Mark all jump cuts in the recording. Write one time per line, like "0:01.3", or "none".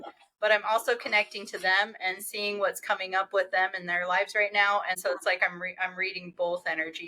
0:05.0